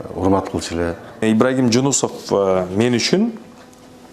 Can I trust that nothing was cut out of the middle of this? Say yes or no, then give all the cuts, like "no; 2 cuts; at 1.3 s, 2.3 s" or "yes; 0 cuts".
no; 1 cut; at 1.1 s